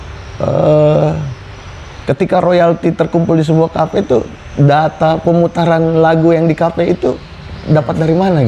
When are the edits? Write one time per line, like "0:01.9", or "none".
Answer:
none